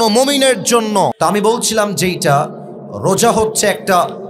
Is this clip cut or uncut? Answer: cut